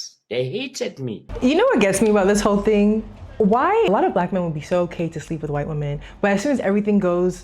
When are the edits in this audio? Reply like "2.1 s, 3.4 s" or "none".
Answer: 1.3 s, 3.9 s